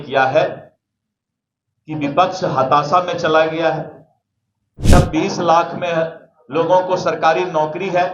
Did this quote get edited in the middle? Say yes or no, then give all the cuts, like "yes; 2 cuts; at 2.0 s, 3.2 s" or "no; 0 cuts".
yes; 1 cut; at 4.9 s